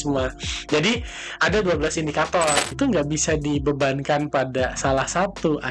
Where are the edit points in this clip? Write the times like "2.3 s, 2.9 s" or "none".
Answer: 2.7 s